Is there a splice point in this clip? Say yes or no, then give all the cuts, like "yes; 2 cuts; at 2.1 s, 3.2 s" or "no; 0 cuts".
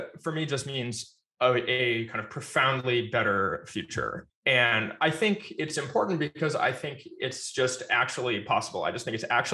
no; 0 cuts